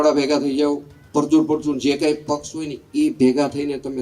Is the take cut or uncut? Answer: cut